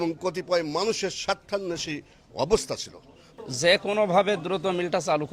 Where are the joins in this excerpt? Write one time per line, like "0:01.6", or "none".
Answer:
0:03.4